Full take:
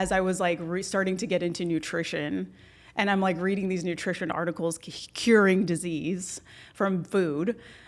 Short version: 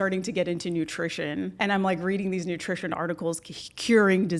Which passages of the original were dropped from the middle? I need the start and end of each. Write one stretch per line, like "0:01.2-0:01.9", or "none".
0:02.5-0:02.9